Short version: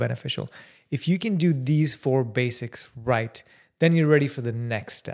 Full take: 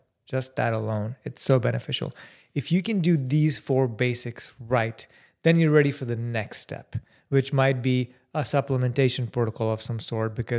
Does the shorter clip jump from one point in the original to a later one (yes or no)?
no